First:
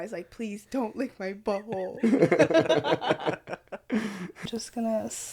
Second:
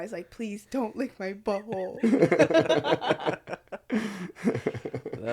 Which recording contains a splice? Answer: first; 1 cut; at 4.4 s

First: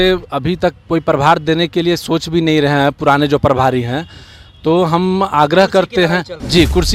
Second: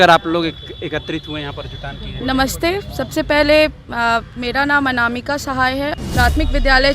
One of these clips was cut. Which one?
second; 1 cut; at 5.9 s

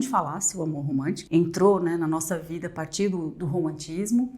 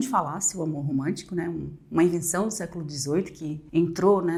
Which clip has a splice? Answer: first; 1 cut; at 1.2 s

